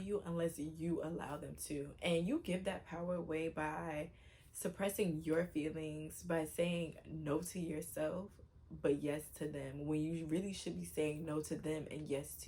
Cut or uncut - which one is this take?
uncut